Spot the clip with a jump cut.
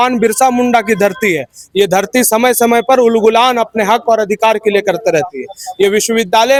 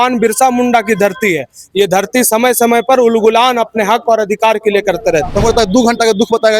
second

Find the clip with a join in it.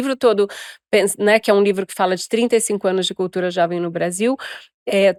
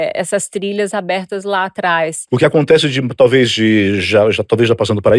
second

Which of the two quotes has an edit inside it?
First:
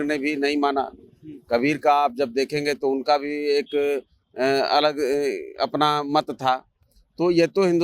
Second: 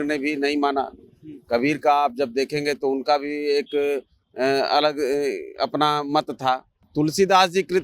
second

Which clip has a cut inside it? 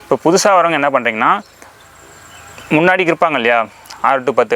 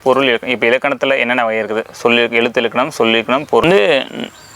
second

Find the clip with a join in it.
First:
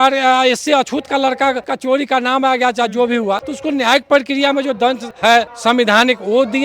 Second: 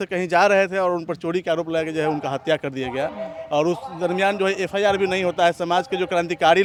first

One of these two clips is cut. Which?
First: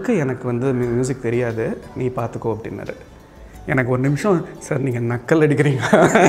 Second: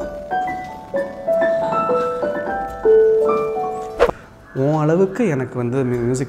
second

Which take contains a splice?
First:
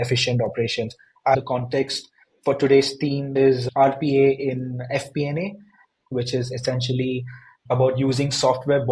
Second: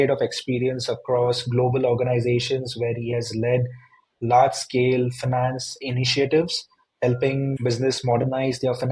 first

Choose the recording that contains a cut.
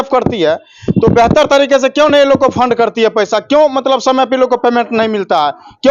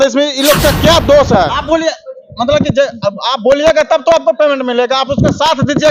second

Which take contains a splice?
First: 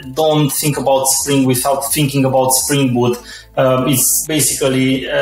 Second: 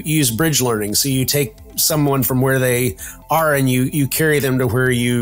first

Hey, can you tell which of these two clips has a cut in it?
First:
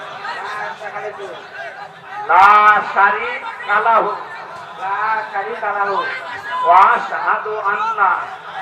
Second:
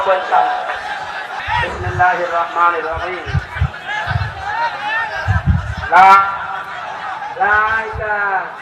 second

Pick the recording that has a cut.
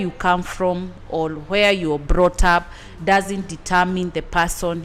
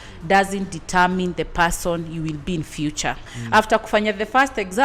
second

